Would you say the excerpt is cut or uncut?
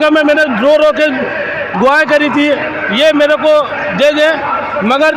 uncut